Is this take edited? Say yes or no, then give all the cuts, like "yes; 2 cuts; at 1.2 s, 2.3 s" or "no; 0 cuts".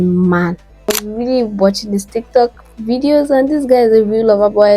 yes; 1 cut; at 1.0 s